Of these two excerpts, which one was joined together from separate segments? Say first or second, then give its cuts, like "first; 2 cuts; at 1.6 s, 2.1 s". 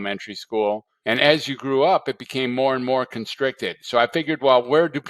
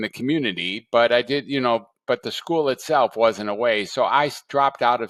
first; 1 cut; at 0.9 s